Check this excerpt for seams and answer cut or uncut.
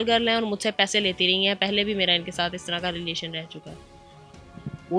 uncut